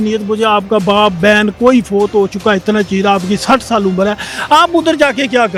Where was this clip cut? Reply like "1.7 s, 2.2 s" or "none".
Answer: none